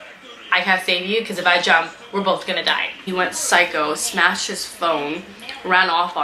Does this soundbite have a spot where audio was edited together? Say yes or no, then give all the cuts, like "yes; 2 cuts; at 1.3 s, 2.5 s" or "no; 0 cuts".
yes; 1 cut; at 3.0 s